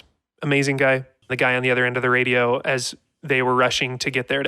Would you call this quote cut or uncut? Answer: cut